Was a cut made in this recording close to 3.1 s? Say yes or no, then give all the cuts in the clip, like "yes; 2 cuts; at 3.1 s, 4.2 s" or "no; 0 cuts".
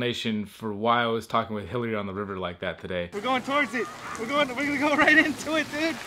yes; 1 cut; at 3.1 s